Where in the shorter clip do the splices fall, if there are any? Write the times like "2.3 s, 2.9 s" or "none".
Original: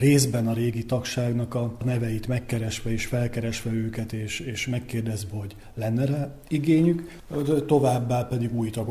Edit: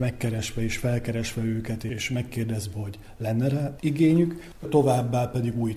1.9 s, 3.7 s, 4.7 s